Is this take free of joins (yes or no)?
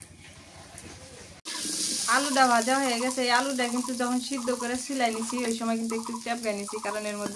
no